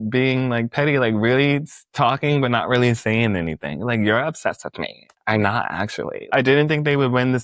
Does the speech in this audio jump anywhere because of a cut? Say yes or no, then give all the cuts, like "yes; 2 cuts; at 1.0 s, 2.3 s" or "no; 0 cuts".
yes; 1 cut; at 6.3 s